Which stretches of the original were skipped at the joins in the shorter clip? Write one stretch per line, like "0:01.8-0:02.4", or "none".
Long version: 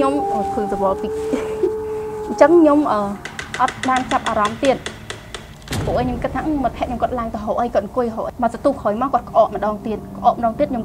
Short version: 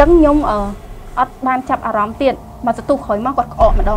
0:04.9-0:08.3